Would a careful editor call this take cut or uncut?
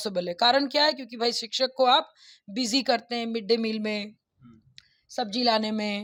uncut